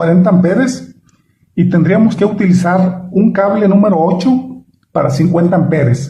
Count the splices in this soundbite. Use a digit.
0